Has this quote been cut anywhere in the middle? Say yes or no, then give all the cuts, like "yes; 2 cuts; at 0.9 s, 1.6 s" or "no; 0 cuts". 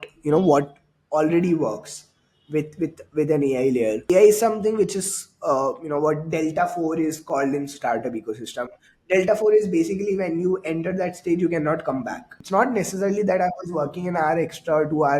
yes; 2 cuts; at 4.0 s, 12.3 s